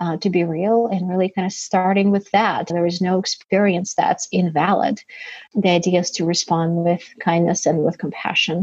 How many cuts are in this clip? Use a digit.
1